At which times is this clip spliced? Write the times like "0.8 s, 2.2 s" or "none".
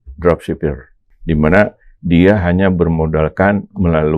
1.1 s

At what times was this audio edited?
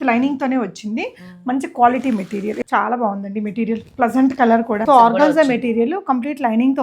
2.6 s, 4.8 s

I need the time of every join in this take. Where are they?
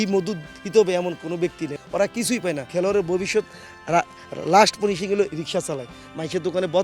1.7 s

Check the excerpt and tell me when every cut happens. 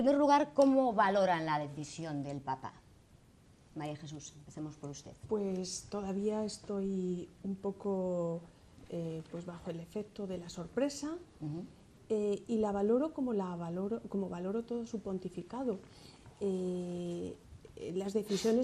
13.1 s

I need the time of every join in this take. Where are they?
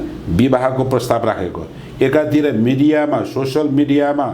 none

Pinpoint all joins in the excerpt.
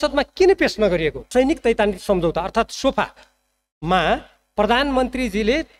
1.2 s

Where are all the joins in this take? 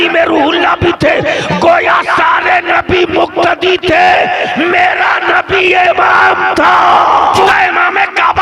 7.4 s

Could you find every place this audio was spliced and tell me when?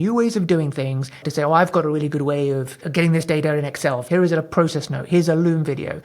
1.2 s, 2.8 s, 4.0 s

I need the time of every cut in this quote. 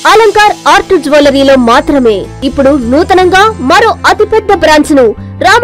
2.4 s

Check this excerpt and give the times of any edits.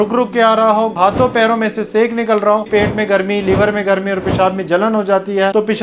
0.9 s, 2.7 s

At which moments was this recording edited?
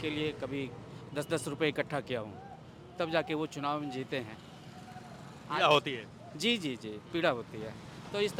none

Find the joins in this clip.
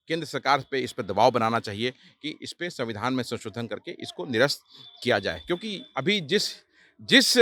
none

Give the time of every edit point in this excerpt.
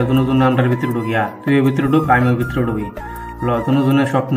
none

